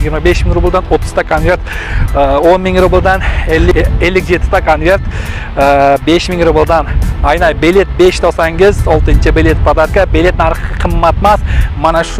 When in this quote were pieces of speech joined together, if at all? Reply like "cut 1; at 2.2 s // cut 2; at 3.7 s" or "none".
none